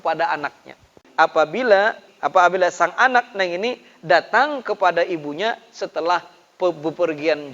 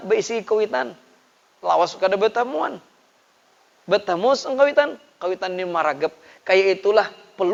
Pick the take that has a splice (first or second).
first